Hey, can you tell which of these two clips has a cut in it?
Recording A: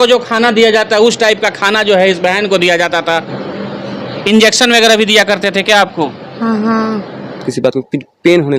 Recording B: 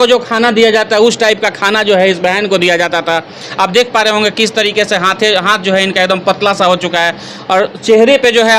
A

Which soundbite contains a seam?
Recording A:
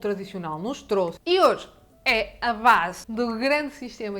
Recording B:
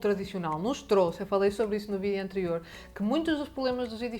A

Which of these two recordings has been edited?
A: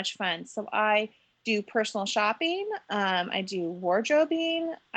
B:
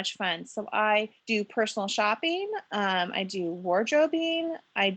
B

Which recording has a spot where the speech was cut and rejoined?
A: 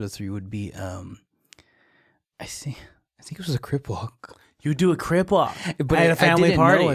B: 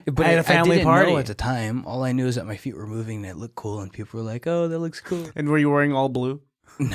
B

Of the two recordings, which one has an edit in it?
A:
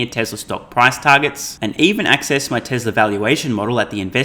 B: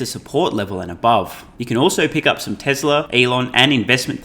B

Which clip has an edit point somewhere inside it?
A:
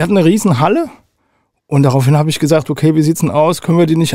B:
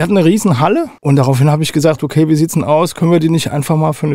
B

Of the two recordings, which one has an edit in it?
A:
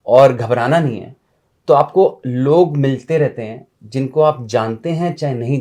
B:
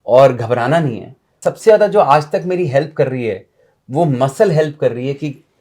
B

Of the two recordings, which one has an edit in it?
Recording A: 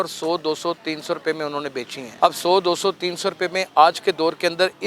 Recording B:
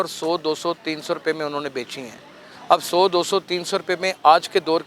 A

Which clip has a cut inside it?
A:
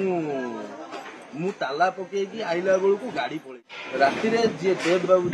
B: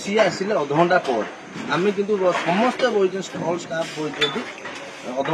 A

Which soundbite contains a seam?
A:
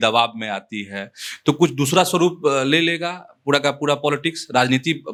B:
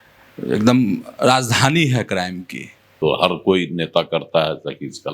B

